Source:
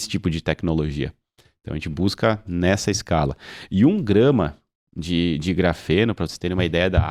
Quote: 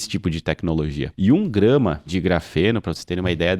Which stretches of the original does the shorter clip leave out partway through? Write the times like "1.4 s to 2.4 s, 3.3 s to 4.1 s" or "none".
1.0 s to 3.6 s, 4.6 s to 5.4 s